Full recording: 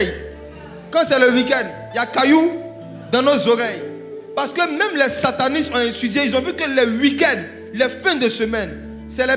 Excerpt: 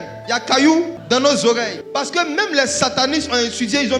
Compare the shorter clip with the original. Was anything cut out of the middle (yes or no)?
yes